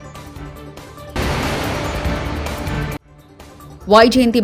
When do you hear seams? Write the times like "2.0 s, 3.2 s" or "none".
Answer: 1.1 s